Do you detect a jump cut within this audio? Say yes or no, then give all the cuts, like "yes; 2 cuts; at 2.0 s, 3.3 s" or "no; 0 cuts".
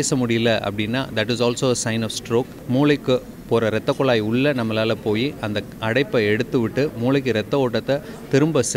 yes; 1 cut; at 2.6 s